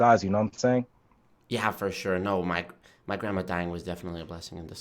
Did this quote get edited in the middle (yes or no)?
no